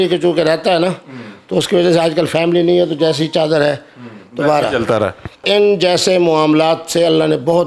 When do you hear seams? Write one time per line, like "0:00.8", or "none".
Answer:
0:05.4